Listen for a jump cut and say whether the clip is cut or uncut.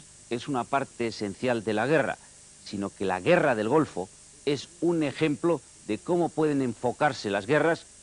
uncut